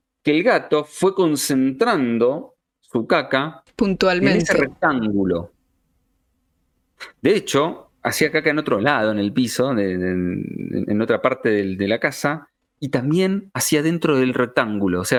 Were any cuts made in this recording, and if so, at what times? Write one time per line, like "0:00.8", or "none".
none